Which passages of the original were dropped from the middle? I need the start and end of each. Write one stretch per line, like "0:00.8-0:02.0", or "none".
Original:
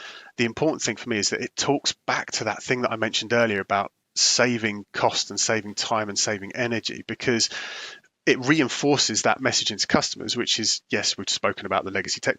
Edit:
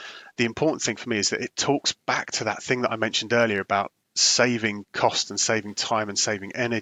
none